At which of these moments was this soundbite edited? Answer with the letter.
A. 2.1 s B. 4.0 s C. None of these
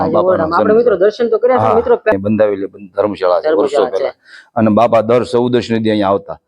A